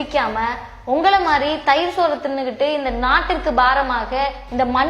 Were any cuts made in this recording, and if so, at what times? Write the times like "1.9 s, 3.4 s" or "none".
none